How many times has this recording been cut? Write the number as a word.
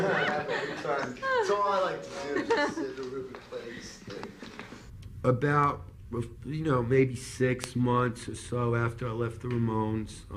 one